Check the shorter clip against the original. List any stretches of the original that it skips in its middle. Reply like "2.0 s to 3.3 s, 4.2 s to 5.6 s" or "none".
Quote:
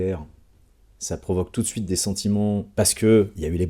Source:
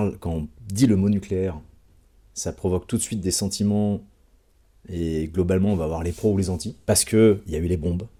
4.0 s to 6.8 s